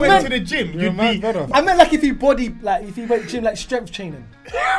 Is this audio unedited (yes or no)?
no